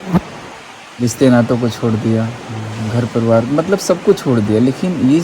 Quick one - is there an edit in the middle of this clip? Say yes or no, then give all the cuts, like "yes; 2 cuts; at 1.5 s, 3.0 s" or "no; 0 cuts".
no; 0 cuts